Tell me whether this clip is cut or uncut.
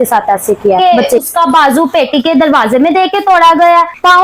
cut